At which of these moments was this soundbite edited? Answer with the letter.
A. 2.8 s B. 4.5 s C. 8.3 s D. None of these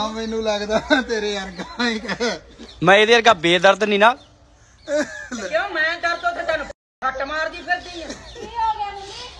D